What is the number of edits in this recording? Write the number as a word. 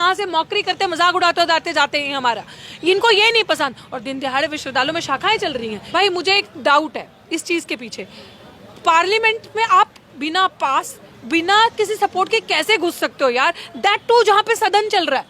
one